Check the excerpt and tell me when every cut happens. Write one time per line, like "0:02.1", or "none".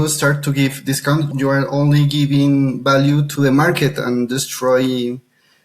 0:01.3
0:03.3